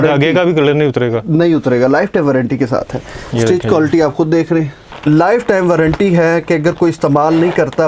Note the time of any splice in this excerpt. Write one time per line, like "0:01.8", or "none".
0:04.9

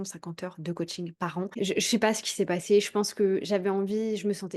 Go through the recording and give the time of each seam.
0:01.5

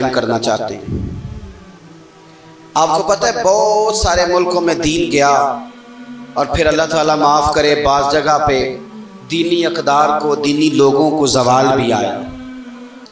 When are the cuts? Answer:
none

